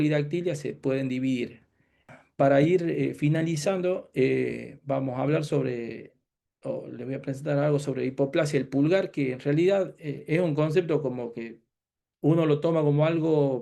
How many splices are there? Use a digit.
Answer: 1